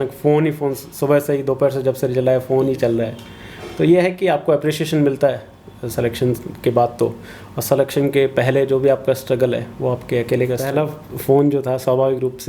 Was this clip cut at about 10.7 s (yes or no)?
yes